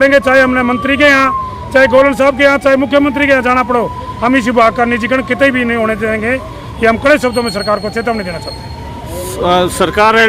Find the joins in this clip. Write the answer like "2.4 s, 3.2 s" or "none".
none